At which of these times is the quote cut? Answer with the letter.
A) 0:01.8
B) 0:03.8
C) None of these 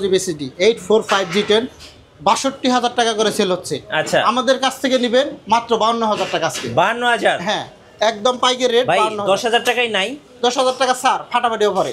C